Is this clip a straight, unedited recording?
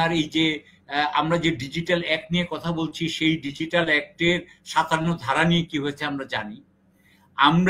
yes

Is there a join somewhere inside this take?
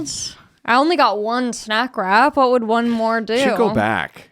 no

